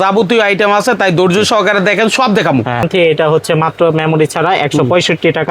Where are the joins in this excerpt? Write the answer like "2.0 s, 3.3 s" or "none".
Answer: 2.8 s